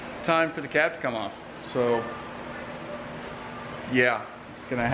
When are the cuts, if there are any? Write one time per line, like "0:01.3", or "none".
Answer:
none